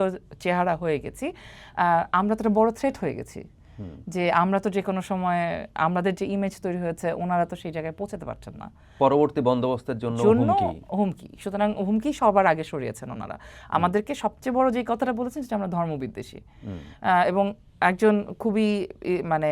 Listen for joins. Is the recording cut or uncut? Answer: uncut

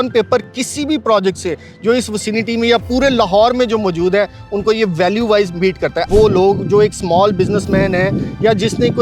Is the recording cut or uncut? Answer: cut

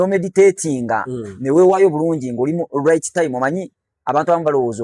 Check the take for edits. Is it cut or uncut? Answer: uncut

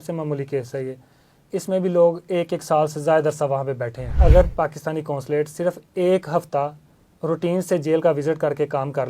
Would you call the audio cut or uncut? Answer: cut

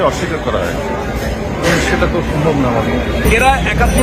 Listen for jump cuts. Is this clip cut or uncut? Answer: uncut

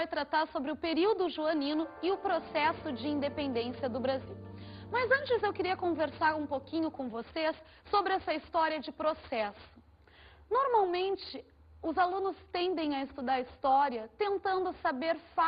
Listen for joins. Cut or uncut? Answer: uncut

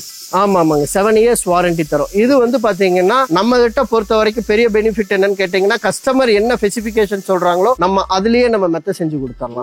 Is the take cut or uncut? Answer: cut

